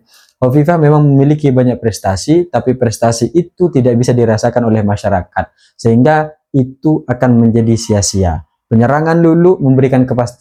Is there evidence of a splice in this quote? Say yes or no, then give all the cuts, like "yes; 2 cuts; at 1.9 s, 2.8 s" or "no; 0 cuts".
no; 0 cuts